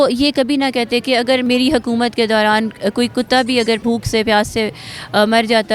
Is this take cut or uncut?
cut